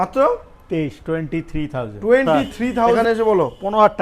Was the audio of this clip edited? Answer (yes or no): yes